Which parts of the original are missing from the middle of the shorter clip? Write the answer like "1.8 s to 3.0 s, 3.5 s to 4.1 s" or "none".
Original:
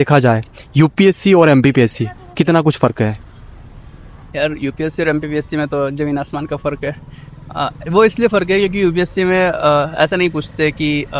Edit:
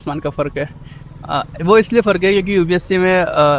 none